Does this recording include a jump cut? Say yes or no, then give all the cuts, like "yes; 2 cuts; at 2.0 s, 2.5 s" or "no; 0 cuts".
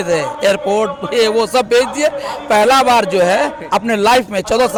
no; 0 cuts